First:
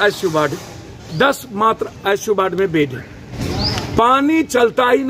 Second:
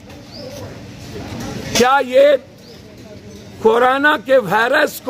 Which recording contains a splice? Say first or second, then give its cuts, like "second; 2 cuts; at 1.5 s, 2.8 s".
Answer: first; 1 cut; at 3.4 s